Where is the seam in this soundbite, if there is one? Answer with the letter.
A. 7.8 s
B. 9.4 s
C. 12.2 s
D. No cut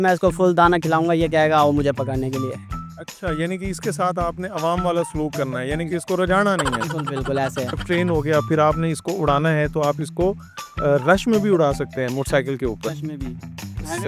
A